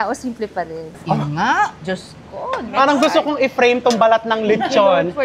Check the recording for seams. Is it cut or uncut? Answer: cut